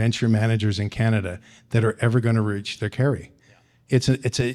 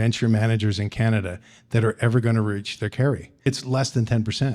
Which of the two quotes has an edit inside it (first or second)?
second